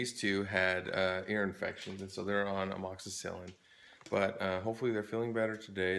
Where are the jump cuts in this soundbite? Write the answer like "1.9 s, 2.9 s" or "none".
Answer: 1.8 s